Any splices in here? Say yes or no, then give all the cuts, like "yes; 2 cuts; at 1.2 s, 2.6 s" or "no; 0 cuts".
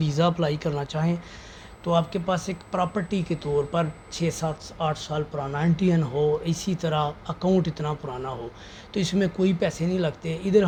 no; 0 cuts